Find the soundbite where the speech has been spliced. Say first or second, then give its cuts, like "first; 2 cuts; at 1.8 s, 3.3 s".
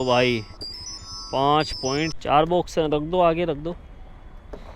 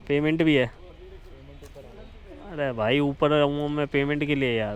first; 1 cut; at 2.2 s